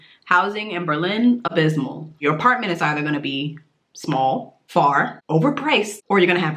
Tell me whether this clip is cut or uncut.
cut